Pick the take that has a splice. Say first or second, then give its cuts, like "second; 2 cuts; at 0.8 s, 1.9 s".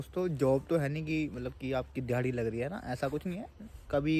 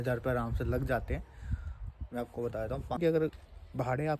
second; 1 cut; at 3.0 s